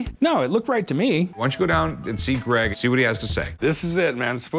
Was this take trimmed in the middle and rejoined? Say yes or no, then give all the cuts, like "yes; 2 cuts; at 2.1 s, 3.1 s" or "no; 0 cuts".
yes; 2 cuts; at 1.3 s, 2.9 s